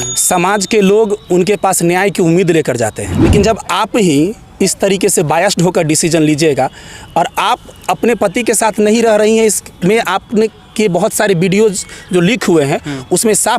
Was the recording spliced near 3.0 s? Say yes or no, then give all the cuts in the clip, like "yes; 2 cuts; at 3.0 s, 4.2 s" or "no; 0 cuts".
yes; 1 cut; at 3.0 s